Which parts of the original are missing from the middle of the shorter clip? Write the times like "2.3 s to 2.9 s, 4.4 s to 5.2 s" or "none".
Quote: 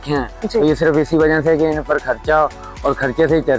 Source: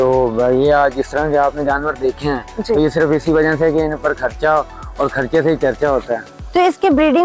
none